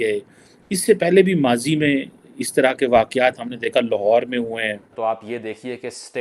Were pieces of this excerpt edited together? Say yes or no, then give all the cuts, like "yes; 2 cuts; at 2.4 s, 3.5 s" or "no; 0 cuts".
yes; 1 cut; at 4.8 s